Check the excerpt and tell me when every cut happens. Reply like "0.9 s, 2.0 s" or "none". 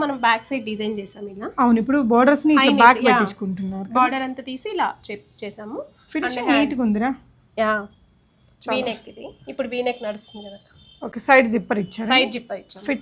none